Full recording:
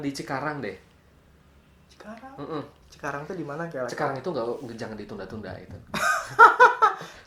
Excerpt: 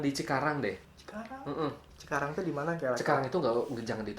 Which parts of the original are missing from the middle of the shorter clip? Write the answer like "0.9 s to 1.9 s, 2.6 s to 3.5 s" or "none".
1.0 s to 1.9 s